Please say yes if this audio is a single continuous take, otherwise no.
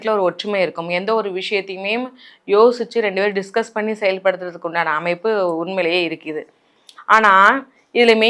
yes